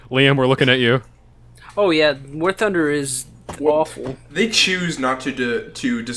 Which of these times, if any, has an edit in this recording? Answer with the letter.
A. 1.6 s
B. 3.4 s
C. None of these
A